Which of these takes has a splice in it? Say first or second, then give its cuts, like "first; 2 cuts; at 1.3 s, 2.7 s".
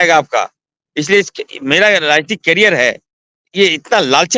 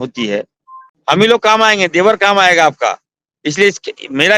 second; 1 cut; at 0.9 s